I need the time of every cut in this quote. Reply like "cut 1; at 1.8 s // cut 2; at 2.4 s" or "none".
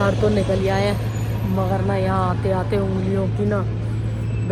none